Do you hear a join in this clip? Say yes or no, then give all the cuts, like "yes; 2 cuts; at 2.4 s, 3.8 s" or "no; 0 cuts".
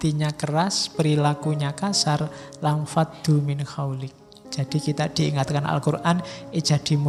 no; 0 cuts